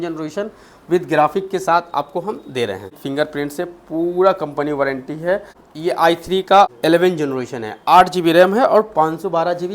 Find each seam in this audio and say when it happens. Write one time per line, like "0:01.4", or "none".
0:03.0
0:05.6
0:06.7